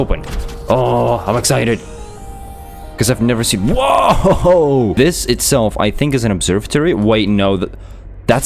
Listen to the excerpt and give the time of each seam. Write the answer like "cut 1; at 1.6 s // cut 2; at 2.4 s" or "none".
cut 1; at 4.9 s